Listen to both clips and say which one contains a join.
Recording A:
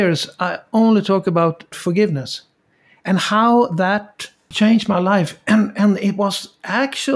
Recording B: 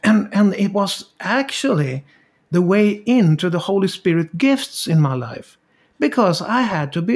A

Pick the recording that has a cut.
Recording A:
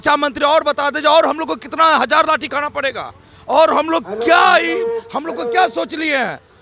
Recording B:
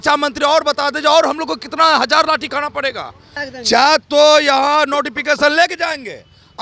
B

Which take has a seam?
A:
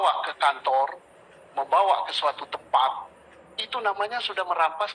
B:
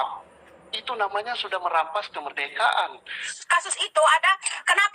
B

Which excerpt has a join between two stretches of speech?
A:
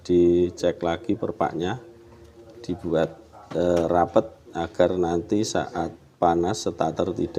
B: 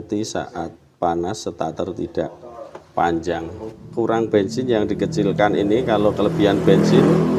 B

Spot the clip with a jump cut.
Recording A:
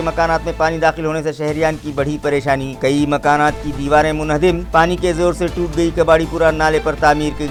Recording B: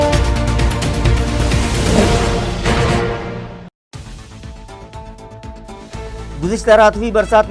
B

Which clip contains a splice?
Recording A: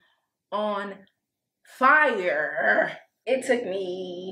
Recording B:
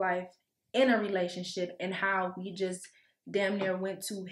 A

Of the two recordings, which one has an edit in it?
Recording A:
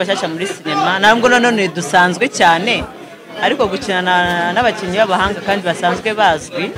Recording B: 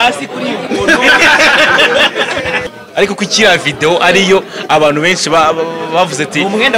B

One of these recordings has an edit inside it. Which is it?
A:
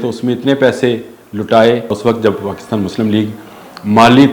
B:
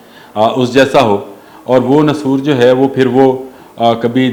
A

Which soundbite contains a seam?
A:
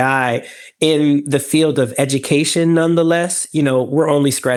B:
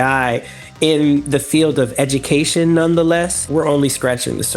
B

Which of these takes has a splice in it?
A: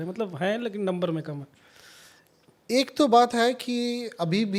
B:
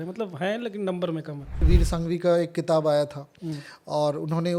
B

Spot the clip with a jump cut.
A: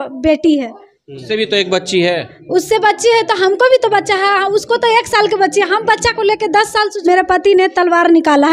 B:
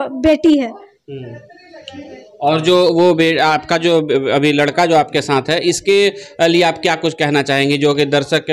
A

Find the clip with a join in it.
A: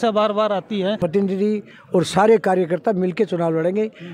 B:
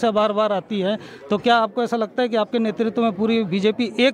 A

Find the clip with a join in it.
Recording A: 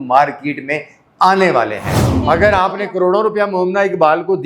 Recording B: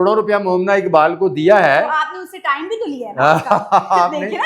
A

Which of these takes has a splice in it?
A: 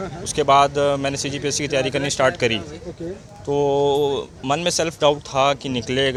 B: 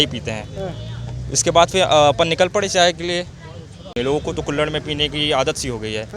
B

